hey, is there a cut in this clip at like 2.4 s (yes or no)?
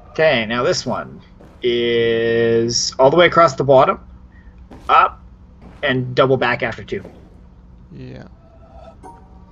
no